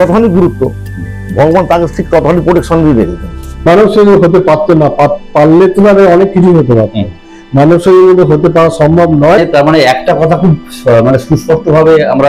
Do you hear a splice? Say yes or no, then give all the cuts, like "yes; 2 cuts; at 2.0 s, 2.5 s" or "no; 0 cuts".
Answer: yes; 2 cuts; at 3.7 s, 9.4 s